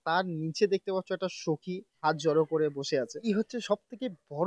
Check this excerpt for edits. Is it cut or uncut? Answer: cut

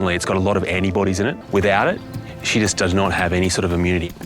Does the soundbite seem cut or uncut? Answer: cut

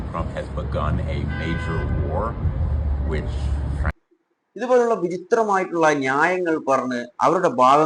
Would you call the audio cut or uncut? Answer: cut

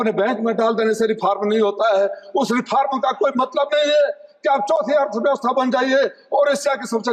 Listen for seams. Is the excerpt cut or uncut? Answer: uncut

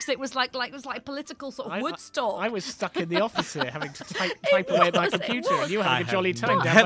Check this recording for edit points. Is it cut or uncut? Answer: uncut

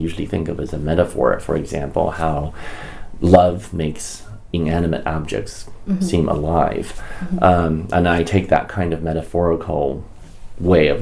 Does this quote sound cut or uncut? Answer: uncut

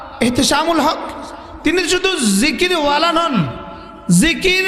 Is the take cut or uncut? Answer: uncut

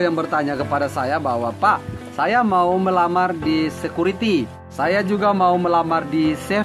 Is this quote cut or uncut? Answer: cut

